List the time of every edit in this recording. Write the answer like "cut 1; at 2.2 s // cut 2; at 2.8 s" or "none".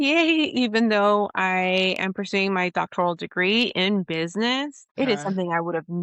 cut 1; at 4.8 s